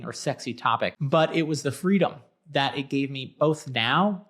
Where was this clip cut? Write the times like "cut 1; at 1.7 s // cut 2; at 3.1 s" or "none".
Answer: cut 1; at 1.0 s